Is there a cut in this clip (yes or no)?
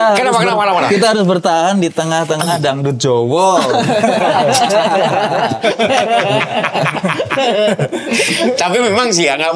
no